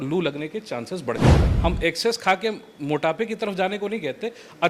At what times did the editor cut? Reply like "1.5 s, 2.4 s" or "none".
1.5 s